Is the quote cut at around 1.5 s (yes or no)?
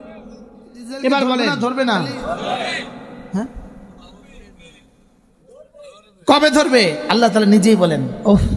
yes